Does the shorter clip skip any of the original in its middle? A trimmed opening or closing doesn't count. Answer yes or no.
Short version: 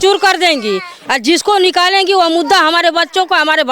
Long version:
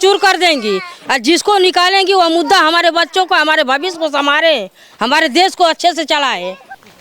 no